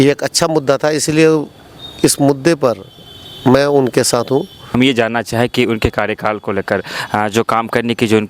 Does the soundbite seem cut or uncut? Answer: cut